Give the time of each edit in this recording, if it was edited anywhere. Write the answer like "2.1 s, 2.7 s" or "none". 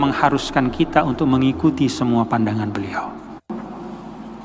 3.4 s